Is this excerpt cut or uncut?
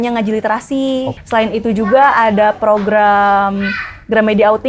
cut